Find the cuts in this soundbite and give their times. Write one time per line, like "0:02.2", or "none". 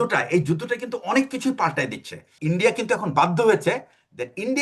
0:02.3